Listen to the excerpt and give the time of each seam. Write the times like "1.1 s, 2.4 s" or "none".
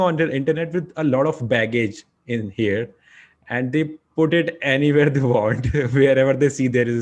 none